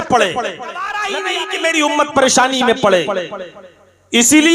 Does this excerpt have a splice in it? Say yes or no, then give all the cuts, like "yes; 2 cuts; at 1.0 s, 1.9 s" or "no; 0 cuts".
yes; 1 cut; at 1.0 s